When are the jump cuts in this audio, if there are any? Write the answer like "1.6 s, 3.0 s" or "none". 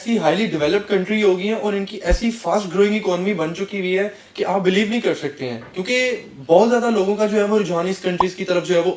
none